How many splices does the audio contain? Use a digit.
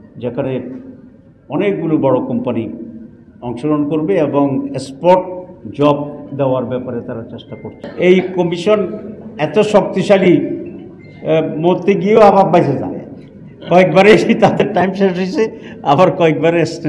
1